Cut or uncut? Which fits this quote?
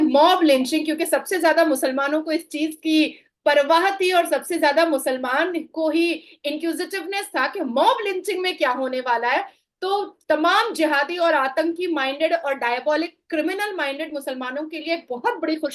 uncut